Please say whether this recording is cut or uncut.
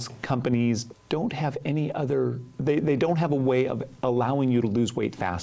cut